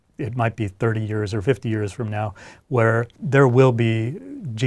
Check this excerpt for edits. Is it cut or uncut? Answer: cut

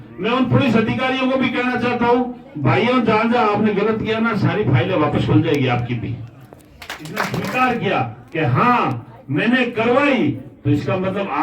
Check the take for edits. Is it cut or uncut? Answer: cut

